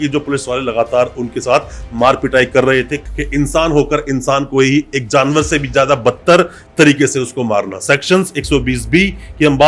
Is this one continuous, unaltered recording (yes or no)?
no